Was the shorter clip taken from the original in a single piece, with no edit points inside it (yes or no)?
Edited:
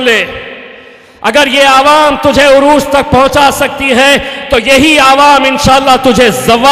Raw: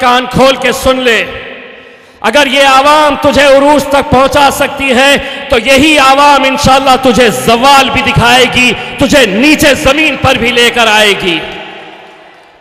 yes